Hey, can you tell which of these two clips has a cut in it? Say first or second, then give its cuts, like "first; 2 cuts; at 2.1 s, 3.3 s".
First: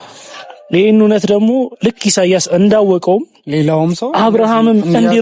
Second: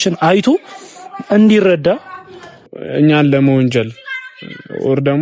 second; 1 cut; at 2.8 s